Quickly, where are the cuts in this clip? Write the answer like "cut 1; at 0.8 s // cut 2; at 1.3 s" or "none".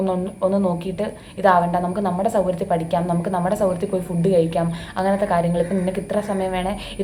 none